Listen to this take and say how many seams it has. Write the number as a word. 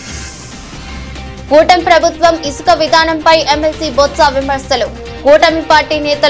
one